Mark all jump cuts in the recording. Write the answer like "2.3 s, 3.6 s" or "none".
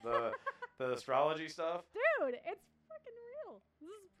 none